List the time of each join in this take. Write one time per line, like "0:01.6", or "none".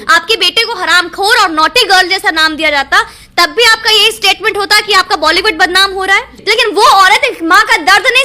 0:06.3